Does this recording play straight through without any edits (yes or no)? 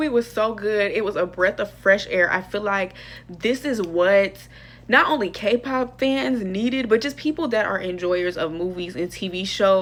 yes